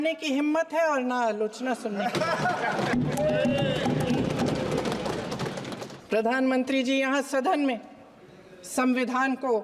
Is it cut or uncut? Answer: cut